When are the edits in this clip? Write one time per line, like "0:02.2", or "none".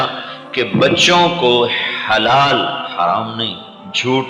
none